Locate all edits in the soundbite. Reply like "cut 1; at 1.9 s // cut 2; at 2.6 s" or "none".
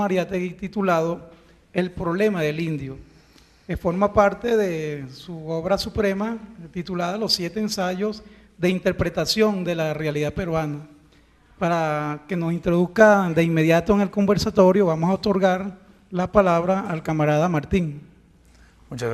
cut 1; at 5.5 s